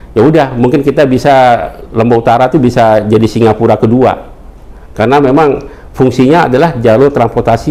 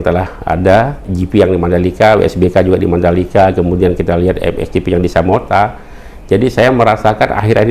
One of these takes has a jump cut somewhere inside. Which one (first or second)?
second